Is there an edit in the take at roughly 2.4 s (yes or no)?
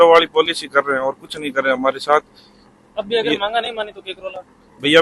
no